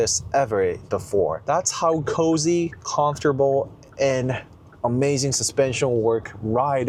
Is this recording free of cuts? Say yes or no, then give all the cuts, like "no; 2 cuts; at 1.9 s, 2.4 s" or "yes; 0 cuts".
yes; 0 cuts